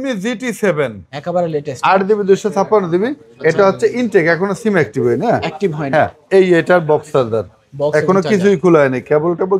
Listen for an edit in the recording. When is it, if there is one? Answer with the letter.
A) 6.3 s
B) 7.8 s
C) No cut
C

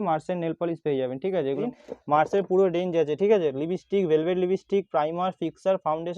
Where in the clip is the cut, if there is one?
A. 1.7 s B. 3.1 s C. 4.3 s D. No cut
A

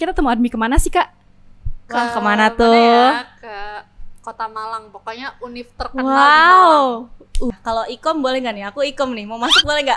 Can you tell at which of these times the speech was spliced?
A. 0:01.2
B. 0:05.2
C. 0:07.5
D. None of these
C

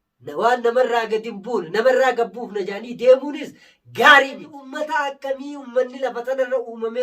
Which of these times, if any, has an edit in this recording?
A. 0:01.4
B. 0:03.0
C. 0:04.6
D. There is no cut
C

